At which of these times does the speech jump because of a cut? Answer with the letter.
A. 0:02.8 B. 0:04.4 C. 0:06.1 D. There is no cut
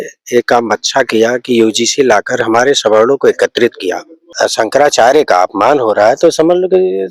B